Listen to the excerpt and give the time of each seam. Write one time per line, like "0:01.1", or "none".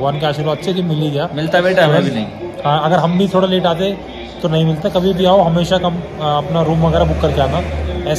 none